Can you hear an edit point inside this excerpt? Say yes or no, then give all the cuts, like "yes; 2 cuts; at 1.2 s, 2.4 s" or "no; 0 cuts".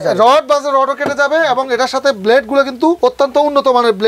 no; 0 cuts